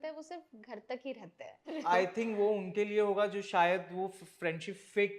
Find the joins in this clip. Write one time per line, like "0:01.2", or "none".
0:01.8